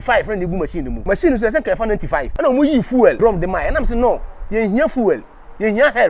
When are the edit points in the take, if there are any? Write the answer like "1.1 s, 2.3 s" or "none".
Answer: 0.9 s, 2.3 s, 3.2 s